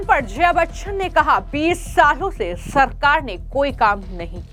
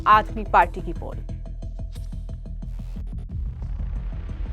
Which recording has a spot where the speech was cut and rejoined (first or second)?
second